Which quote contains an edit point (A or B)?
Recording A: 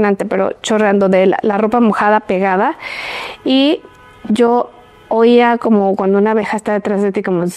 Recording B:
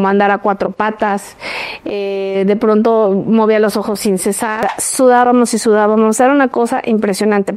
B